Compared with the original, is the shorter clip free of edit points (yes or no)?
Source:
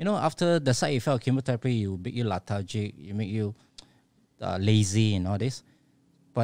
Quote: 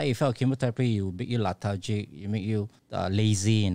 no